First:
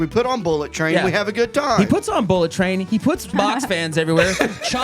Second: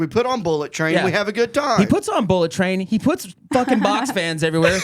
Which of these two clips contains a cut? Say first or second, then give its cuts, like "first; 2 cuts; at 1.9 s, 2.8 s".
first; 1 cut; at 3.3 s